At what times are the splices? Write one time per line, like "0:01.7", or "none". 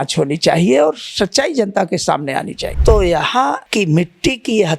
0:02.6
0:03.6